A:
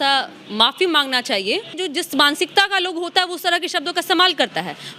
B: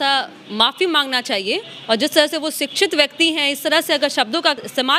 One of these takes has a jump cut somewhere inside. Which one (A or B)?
A